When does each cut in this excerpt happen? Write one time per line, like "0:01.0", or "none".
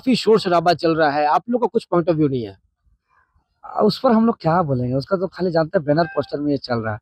none